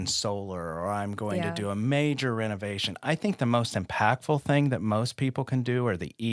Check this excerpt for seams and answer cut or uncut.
uncut